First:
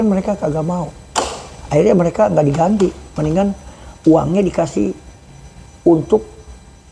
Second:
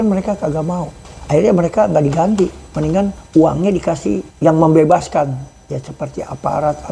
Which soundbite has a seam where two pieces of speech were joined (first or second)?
second